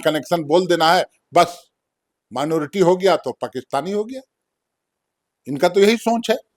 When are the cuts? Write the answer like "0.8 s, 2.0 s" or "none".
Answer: none